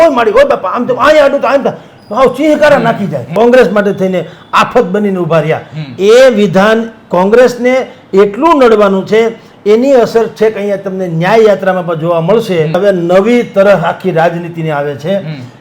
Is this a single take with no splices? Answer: no; 2 cuts; at 3.3 s, 12.8 s

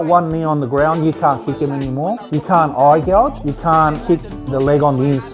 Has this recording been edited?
no; 0 cuts

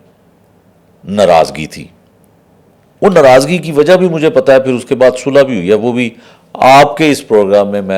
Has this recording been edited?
no; 0 cuts

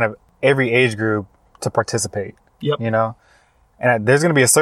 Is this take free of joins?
yes; 0 cuts

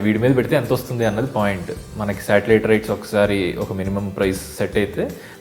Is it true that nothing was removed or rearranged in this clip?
yes; 0 cuts

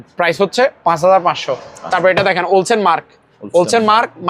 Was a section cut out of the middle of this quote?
no; 0 cuts

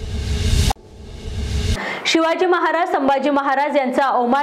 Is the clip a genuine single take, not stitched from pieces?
yes; 0 cuts

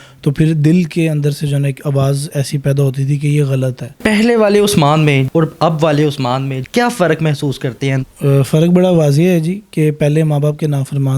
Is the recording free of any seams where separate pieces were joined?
no; 4 cuts; at 4.0 s, 5.2 s, 6.6 s, 8.0 s

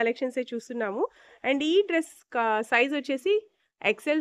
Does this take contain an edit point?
no; 0 cuts

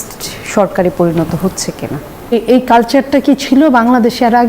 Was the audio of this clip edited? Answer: yes; 1 cut; at 2.3 s

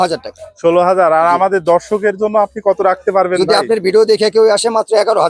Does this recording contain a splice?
no; 0 cuts

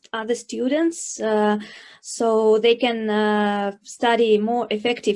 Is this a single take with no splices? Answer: yes; 0 cuts

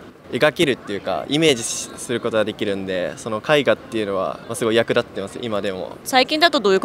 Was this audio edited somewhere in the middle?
no; 0 cuts

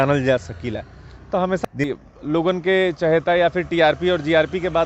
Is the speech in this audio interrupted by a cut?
yes; 1 cut; at 1.6 s

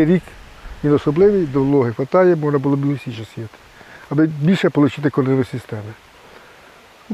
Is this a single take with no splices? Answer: yes; 0 cuts

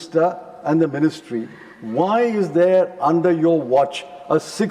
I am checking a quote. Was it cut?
no; 0 cuts

